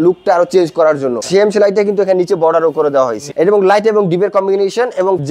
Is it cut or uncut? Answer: cut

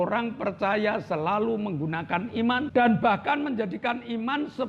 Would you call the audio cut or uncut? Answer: cut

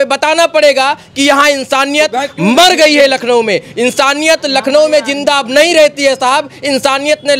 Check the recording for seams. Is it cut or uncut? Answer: uncut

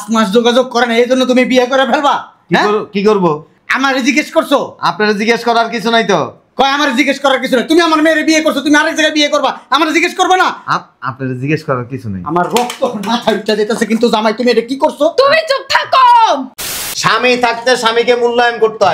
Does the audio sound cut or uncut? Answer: cut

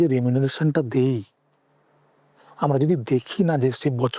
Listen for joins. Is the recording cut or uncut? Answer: uncut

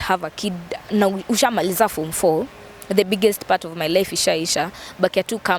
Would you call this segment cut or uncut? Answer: uncut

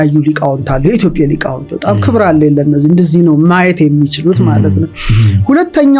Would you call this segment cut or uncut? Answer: uncut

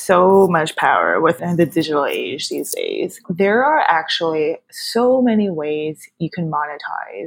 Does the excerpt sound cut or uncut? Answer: cut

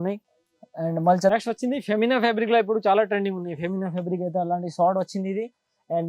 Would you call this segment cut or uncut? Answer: cut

